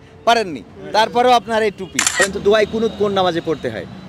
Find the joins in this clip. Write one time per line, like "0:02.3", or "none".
0:02.2